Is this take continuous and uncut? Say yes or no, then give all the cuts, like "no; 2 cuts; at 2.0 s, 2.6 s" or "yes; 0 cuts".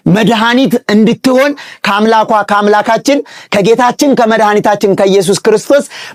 yes; 0 cuts